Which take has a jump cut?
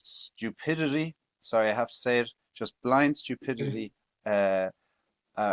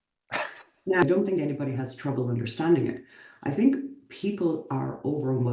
second; 1 cut; at 1.0 s

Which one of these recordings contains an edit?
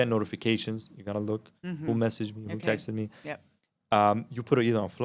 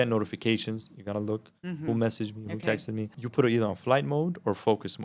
second; 1 cut; at 3.2 s

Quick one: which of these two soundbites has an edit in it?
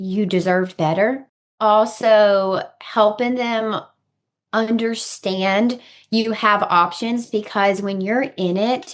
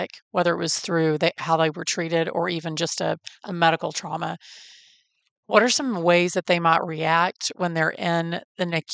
first; 1 cut; at 1.5 s

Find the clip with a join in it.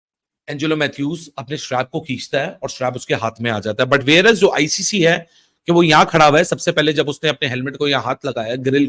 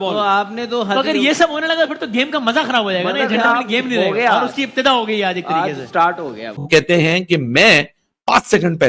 second; 1 cut; at 6.7 s

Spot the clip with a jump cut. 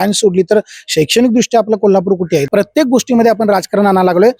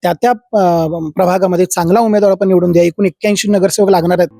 first; 1 cut; at 2.5 s

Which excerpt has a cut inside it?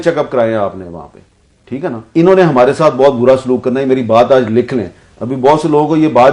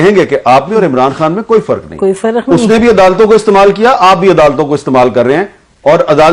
first; 1 cut; at 2.0 s

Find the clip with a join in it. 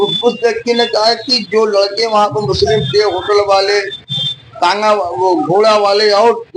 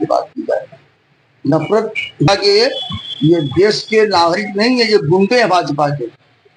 second; 1 cut; at 2.3 s

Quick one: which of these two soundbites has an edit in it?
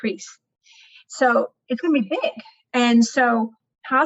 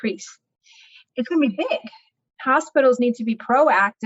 second; 2 cuts; at 1.0 s, 2.1 s

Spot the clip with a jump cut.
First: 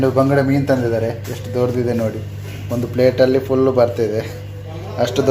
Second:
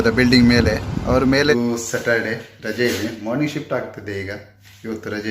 second; 1 cut; at 1.5 s

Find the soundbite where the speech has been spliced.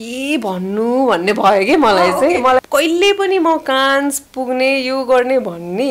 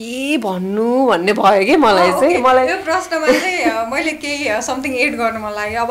first; 1 cut; at 2.6 s

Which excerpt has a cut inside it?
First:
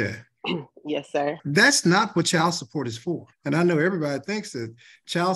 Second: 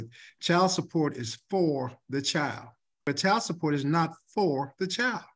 first; 2 cuts; at 1.4 s, 3.3 s

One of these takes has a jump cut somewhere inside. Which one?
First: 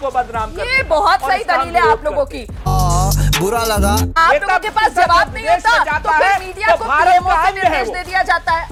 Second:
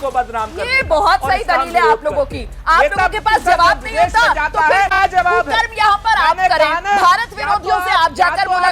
second; 2 cuts; at 2.6 s, 5.0 s

